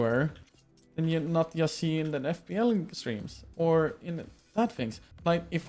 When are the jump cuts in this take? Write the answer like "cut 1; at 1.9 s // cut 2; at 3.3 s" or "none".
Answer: none